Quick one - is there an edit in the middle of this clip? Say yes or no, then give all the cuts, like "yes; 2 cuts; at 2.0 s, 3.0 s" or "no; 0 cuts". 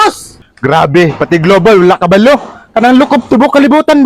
no; 0 cuts